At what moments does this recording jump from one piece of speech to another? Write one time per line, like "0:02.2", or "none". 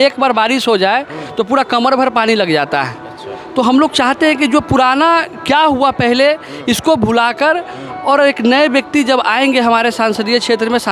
none